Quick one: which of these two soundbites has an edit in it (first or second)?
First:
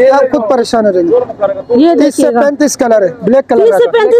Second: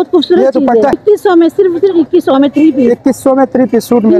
second